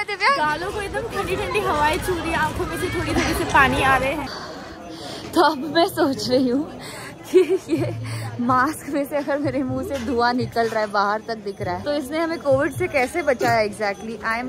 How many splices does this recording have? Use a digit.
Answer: 2